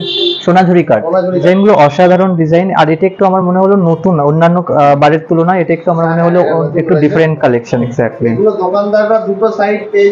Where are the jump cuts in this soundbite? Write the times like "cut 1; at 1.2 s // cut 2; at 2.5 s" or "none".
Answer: cut 1; at 1.4 s // cut 2; at 7.9 s